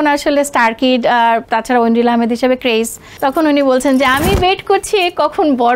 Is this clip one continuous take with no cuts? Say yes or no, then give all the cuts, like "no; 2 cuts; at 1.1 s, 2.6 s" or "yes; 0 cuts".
no; 2 cuts; at 1.5 s, 3.0 s